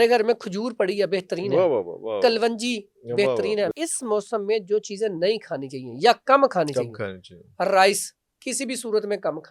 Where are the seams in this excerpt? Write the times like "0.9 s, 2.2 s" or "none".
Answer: 3.7 s